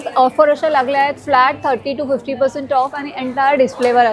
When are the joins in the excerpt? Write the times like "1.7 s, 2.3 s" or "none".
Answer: none